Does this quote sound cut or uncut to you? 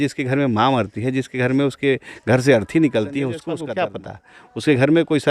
cut